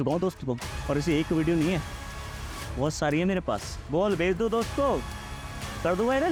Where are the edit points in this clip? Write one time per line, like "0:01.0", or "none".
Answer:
none